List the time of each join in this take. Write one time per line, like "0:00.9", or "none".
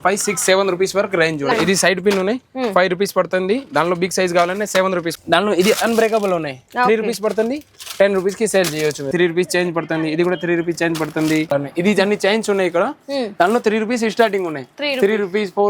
0:01.5
0:05.1
0:09.1
0:11.5